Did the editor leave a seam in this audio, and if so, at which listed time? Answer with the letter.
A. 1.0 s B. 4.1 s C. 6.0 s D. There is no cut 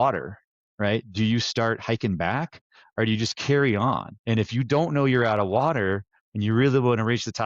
B